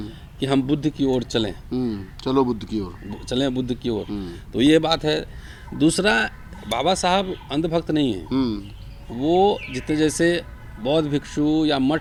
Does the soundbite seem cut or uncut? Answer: uncut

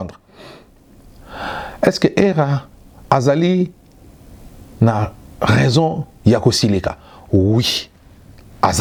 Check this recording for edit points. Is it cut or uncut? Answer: uncut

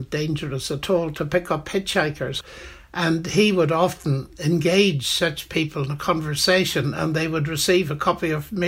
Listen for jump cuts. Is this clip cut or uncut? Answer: cut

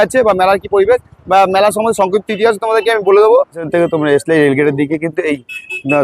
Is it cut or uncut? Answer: cut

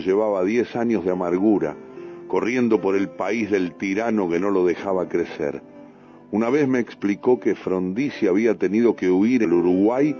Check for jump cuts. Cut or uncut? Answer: cut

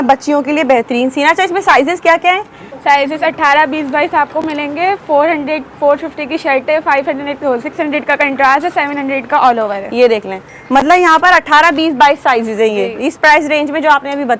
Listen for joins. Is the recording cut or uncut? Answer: uncut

